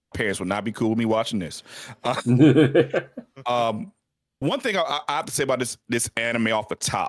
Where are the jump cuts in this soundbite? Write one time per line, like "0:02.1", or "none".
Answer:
none